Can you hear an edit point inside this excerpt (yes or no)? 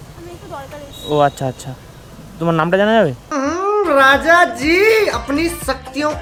no